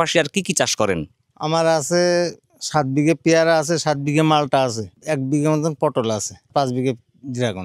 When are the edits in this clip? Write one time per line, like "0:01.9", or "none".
0:04.9
0:06.5